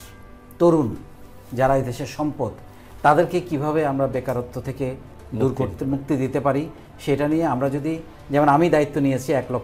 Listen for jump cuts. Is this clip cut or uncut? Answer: uncut